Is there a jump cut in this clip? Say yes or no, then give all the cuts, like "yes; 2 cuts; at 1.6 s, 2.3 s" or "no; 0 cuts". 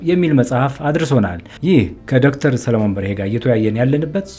yes; 1 cut; at 1.5 s